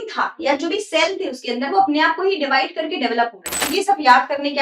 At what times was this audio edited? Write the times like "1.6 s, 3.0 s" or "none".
3.7 s